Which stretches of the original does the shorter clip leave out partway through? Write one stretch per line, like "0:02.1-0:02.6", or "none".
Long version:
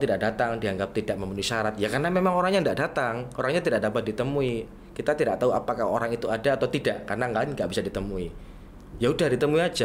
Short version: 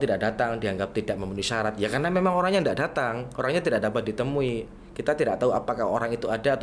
none